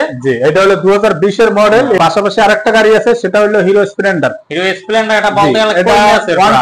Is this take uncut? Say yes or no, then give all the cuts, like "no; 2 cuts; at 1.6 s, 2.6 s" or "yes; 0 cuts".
no; 1 cut; at 2.0 s